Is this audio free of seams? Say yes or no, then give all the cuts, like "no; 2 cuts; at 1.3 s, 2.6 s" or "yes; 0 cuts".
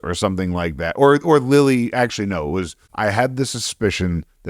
no; 1 cut; at 2.8 s